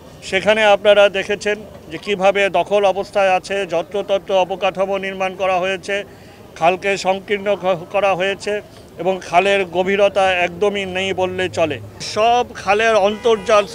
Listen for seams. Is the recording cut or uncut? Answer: cut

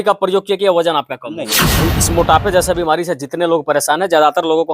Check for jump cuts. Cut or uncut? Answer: cut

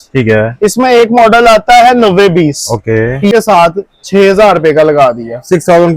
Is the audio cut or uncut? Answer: cut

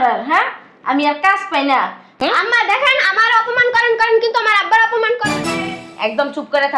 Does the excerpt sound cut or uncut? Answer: cut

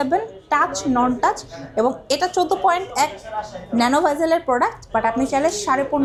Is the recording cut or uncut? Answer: uncut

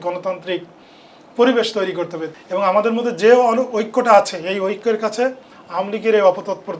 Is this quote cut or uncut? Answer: cut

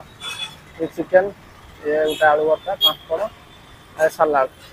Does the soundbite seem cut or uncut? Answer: uncut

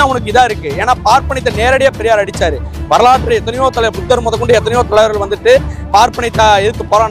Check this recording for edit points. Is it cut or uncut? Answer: uncut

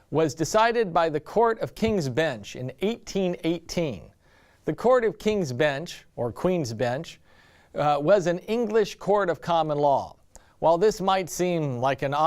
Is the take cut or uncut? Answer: cut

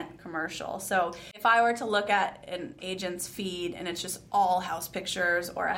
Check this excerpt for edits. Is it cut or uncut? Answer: cut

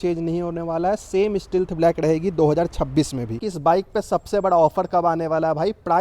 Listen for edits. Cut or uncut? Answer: cut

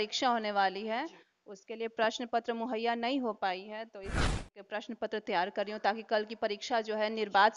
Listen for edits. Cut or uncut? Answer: cut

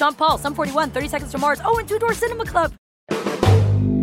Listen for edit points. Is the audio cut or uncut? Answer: cut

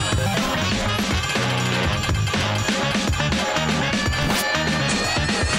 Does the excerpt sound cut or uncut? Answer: uncut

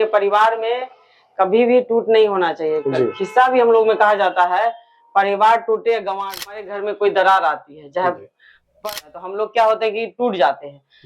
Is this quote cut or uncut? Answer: cut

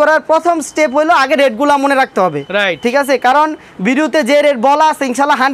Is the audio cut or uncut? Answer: uncut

